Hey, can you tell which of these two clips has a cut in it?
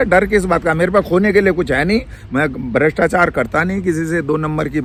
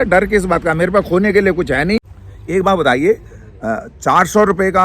second; 1 cut; at 2.2 s

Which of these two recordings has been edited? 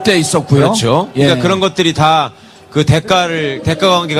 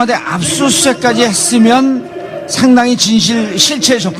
second; 1 cut; at 2.5 s

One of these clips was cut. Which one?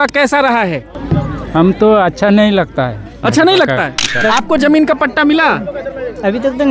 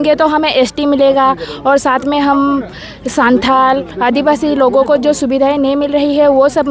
first; 2 cuts; at 0.9 s, 4.2 s

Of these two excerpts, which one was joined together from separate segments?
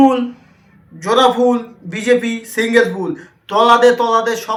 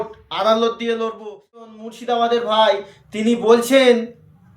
second; 1 cut; at 1.7 s

